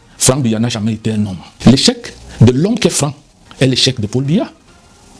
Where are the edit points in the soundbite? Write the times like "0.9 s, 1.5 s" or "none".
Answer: 1.4 s